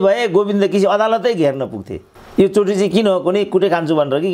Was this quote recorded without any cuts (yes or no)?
yes